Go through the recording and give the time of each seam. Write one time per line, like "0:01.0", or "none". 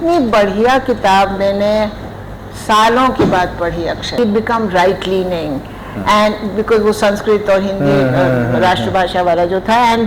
0:04.1